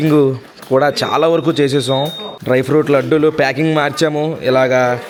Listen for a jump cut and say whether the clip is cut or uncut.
uncut